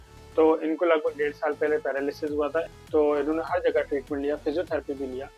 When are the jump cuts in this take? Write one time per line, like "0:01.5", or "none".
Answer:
0:02.7

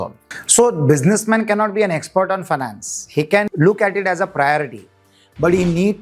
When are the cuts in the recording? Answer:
0:03.5

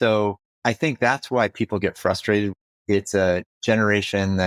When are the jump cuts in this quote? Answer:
0:02.5

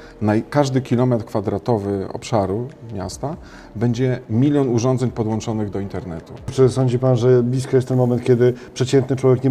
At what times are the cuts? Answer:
0:06.5

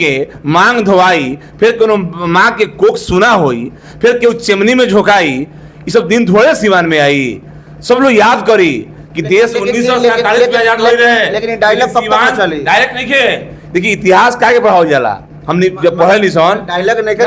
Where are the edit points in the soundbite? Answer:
none

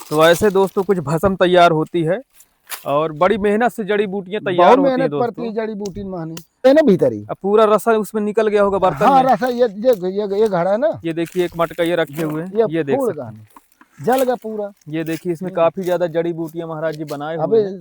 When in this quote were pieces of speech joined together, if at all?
0:06.7

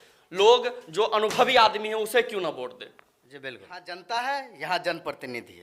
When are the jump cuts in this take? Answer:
0:03.9

